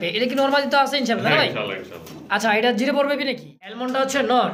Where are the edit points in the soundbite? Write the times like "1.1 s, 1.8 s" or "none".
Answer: 3.6 s